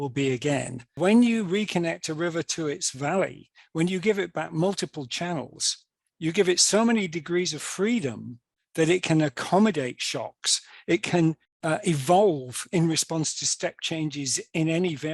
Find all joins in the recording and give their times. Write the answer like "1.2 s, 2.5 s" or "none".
0.9 s, 11.5 s